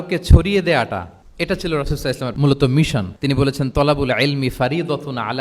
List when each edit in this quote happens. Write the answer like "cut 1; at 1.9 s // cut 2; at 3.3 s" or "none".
cut 1; at 1.2 s // cut 2; at 2.3 s // cut 3; at 3.1 s